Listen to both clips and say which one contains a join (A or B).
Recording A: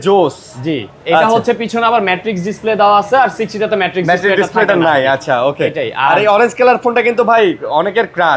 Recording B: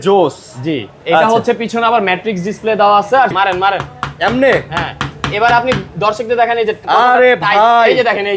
B